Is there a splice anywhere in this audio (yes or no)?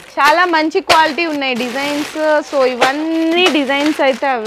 no